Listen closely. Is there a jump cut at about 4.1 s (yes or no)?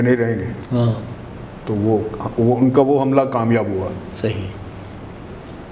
no